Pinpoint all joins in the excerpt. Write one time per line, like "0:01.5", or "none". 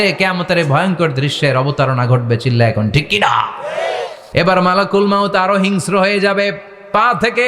0:04.0